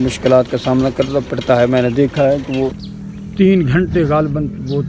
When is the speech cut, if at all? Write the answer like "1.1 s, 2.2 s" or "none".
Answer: 2.8 s